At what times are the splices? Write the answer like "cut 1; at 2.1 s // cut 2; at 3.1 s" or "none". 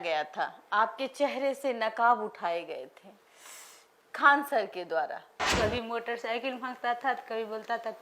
cut 1; at 5.4 s